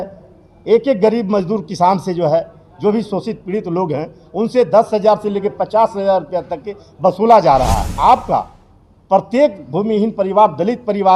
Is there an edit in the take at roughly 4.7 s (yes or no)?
no